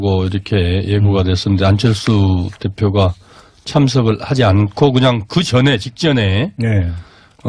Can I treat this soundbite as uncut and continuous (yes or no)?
no